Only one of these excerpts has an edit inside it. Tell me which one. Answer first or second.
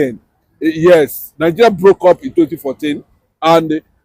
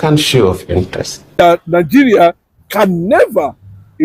second